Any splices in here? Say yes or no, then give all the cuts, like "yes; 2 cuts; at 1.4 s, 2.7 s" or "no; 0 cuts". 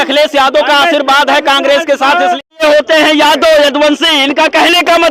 yes; 1 cut; at 2.6 s